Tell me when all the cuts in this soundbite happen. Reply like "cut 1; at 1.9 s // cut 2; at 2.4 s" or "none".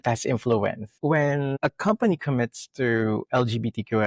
cut 1; at 1.5 s

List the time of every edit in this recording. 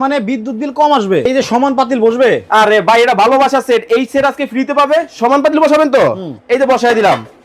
cut 1; at 1.3 s

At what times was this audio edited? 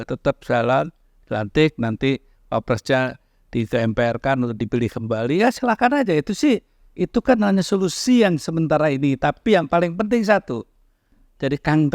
cut 1; at 11.0 s

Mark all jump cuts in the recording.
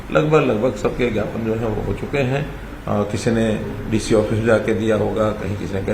none

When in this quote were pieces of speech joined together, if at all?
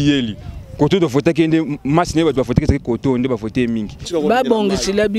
cut 1; at 4.1 s

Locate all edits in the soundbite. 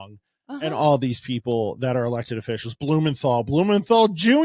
none

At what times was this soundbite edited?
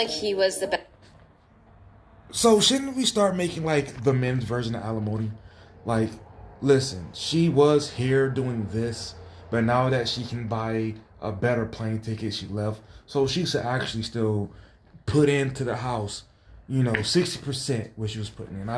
none

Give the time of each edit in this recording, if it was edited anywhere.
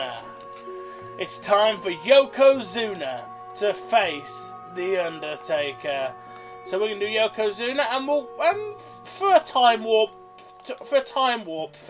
cut 1; at 8.3 s

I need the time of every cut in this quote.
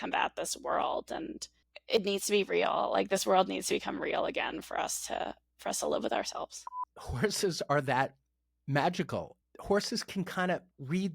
cut 1; at 6.7 s // cut 2; at 9.4 s

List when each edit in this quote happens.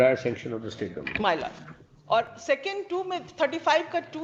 none

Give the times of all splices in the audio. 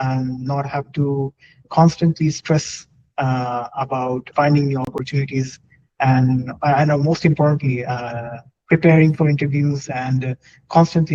cut 1; at 1.6 s // cut 2; at 4.3 s

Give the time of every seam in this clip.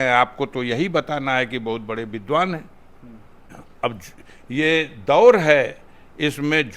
cut 1; at 3.4 s

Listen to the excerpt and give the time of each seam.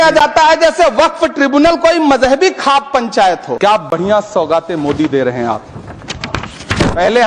cut 1; at 3.5 s

